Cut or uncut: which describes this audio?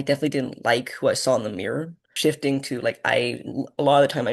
cut